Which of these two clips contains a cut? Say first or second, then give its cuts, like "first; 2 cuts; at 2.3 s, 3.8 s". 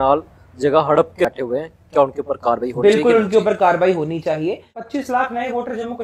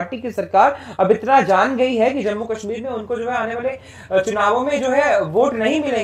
first; 2 cuts; at 1.2 s, 4.9 s